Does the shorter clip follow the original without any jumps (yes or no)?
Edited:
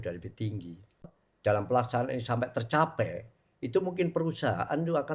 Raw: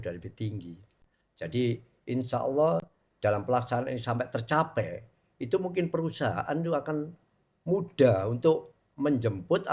no